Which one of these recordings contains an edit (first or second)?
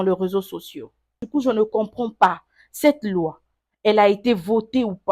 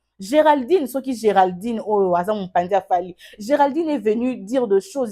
first